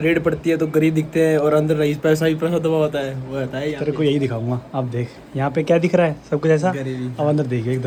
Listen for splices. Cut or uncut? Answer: uncut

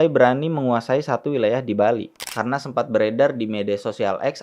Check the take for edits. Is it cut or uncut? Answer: cut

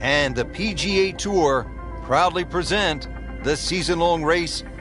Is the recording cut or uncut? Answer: uncut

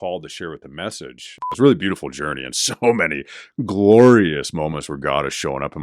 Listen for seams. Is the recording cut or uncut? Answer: cut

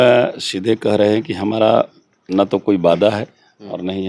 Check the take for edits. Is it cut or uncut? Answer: uncut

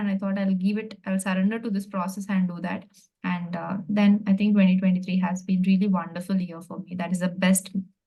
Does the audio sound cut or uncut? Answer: uncut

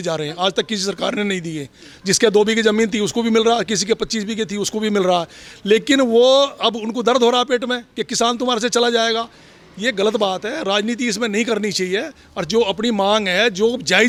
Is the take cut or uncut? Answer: uncut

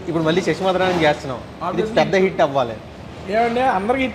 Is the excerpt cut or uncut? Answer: uncut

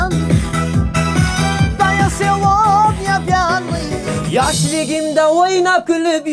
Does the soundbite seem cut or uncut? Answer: cut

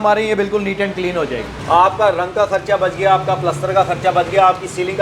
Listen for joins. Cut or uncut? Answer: cut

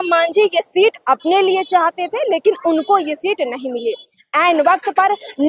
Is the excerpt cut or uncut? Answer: uncut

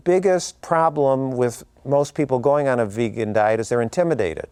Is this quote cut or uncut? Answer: uncut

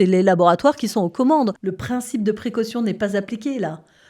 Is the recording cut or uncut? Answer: cut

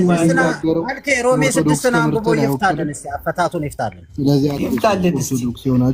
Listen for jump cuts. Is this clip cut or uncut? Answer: uncut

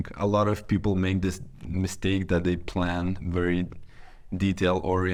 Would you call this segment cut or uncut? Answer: uncut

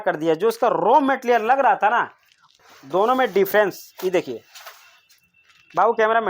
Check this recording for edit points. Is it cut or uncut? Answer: cut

